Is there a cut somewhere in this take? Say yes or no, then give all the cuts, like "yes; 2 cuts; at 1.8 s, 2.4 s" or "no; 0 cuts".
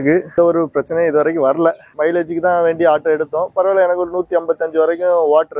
no; 0 cuts